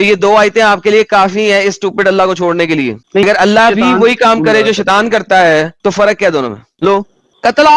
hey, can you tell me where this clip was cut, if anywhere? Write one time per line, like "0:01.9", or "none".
0:03.2
0:06.6